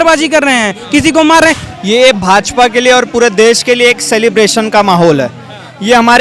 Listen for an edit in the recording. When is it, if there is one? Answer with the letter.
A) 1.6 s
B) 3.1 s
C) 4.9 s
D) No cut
A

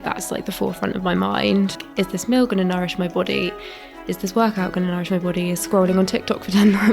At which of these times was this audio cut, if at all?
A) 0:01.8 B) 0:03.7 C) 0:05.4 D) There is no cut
A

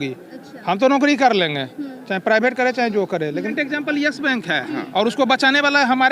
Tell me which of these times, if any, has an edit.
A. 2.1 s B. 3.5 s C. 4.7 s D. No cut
B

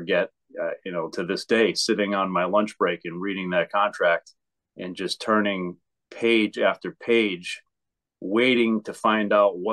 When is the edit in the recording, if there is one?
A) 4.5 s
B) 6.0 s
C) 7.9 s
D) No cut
D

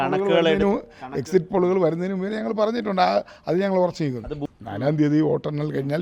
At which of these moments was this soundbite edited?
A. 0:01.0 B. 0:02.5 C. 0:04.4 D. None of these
C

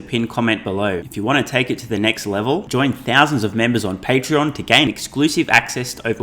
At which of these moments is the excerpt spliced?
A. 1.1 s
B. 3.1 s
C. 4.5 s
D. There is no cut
A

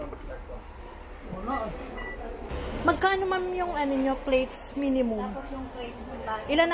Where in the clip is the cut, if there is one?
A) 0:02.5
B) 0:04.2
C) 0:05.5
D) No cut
A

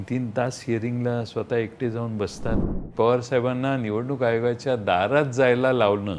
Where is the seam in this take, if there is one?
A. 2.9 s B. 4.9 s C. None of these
A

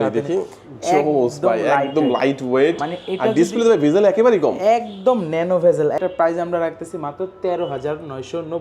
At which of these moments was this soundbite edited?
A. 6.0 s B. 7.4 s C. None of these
A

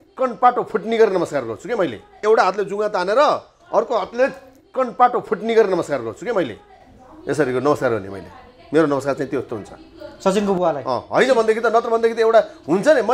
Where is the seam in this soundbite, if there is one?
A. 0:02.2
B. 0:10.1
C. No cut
A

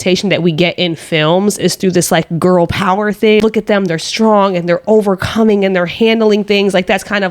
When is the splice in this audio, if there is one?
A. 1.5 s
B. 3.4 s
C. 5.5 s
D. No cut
B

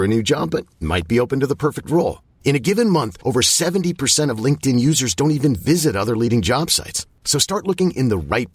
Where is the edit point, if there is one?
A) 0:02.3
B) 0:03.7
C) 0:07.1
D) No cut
D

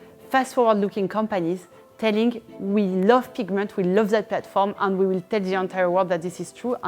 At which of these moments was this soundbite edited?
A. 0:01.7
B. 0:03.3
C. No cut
C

